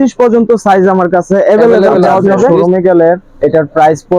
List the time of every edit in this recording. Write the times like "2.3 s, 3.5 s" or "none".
2.6 s

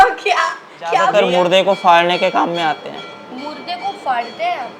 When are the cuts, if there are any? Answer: 1.1 s

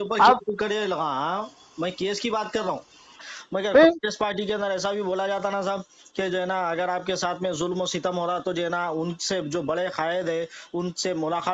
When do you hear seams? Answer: 3.2 s

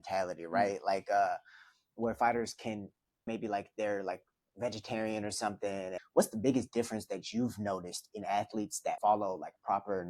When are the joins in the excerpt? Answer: 3.3 s, 6.0 s, 9.0 s

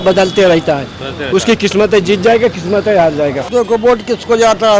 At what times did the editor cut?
3.4 s

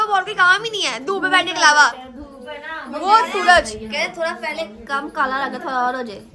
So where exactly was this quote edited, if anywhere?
none

